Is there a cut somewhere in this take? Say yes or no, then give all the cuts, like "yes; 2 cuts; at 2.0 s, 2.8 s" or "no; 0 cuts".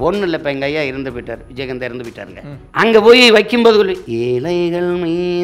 yes; 2 cuts; at 2.6 s, 4.0 s